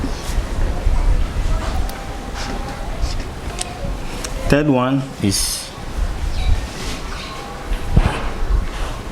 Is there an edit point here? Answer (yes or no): no